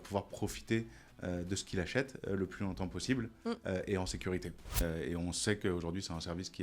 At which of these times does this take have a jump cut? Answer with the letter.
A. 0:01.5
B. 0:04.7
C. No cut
B